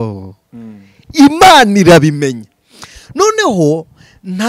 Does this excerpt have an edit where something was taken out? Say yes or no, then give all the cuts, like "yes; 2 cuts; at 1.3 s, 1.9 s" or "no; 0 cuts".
no; 0 cuts